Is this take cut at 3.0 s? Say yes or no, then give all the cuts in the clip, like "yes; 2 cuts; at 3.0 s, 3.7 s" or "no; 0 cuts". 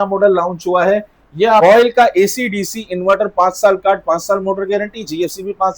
no; 1 cut; at 1.6 s